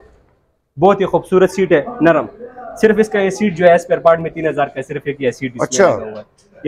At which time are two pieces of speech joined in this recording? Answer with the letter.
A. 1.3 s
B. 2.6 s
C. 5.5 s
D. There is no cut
D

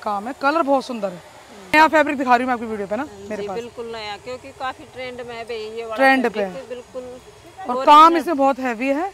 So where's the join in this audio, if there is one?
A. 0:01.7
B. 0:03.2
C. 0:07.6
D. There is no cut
A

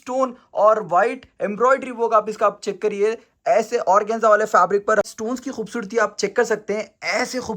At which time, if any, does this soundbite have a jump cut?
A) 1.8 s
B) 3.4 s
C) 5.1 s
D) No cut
C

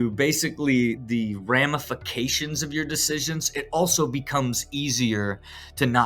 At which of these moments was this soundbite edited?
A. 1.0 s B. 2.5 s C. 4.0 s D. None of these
A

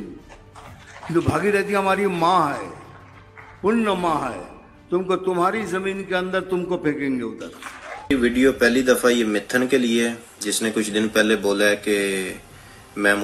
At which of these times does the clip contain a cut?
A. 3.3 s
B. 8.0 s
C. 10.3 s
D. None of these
B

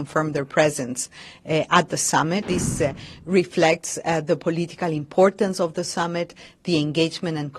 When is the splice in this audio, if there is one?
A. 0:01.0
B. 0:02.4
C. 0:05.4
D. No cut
B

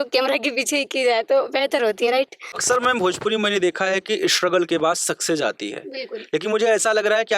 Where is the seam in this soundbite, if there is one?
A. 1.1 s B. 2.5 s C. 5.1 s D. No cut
B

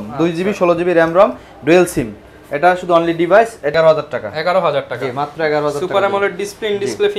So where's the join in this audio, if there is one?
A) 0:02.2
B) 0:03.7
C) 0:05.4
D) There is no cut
B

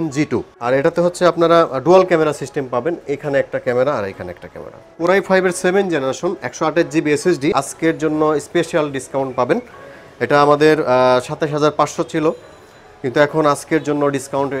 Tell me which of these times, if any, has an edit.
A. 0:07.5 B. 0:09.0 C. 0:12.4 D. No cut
A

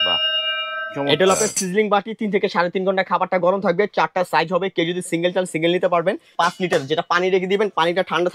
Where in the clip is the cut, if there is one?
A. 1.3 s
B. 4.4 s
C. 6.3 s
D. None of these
C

